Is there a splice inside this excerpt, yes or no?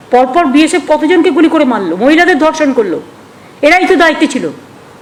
no